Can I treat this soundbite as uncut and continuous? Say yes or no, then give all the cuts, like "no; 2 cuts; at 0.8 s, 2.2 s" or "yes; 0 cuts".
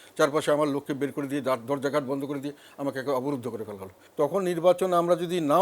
no; 1 cut; at 4.0 s